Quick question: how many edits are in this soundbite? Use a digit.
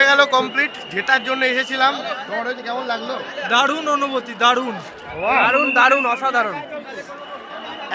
0